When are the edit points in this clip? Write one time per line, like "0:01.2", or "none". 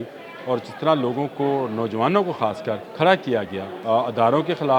0:02.9
0:03.7